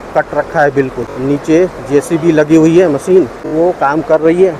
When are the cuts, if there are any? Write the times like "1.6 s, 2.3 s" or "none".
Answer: 1.1 s, 3.4 s